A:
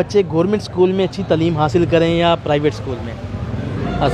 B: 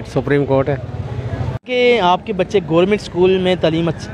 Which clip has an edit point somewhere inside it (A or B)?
B